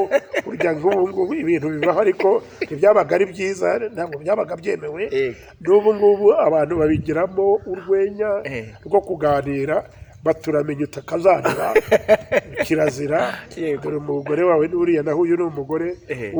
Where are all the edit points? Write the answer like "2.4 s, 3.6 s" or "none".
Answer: none